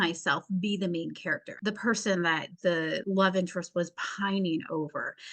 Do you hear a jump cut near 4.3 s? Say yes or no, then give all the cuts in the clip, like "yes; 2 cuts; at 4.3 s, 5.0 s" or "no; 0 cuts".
no; 2 cuts; at 1.5 s, 2.8 s